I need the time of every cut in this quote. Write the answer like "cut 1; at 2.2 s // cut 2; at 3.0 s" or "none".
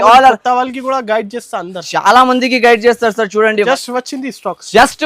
cut 1; at 3.7 s